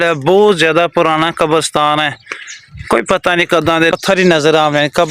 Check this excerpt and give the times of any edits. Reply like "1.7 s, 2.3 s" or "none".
3.9 s